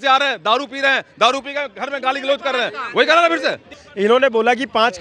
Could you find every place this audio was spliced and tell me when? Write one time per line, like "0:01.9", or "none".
0:03.8